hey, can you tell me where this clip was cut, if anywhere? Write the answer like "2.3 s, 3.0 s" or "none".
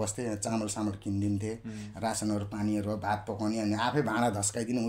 none